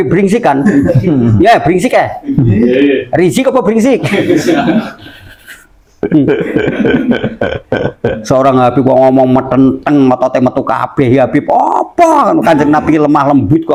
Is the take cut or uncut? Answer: uncut